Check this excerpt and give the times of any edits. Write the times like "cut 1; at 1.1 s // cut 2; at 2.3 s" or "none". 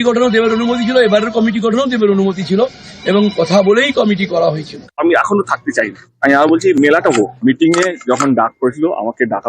none